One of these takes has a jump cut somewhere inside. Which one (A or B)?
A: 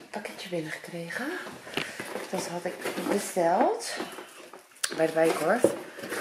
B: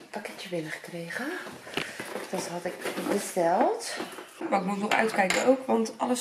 B